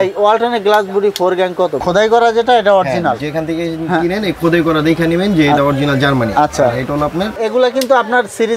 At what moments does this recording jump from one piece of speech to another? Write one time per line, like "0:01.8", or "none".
0:01.8
0:07.4